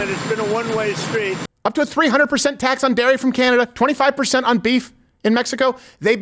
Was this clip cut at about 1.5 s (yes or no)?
yes